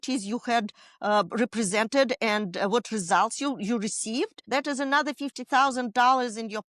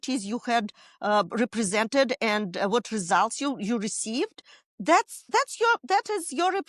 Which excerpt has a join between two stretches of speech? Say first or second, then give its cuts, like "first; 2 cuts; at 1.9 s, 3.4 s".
first; 1 cut; at 4.4 s